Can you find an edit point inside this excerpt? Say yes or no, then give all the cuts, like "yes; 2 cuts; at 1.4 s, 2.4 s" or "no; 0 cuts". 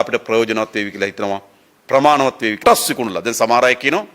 yes; 1 cut; at 2.6 s